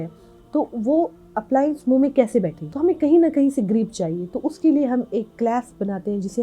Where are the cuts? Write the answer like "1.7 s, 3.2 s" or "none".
2.6 s

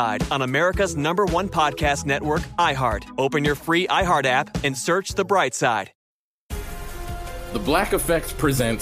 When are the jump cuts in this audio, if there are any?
6.0 s

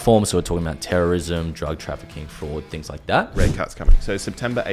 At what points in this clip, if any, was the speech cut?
3.3 s

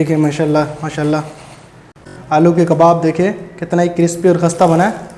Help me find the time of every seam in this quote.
1.9 s

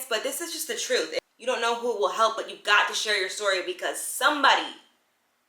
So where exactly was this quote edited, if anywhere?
1.2 s

